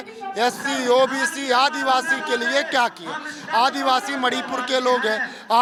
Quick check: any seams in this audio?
no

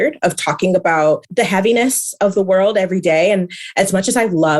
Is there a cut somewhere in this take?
yes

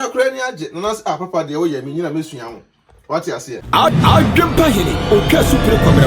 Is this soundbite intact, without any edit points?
no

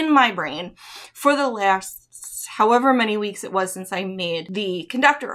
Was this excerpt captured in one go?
no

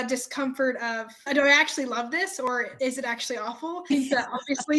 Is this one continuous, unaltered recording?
no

